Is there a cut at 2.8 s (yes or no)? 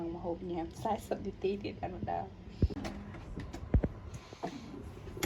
yes